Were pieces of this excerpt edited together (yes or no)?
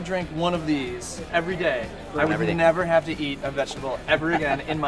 no